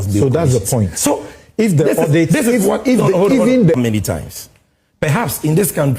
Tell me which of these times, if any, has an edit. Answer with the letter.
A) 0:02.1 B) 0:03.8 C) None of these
B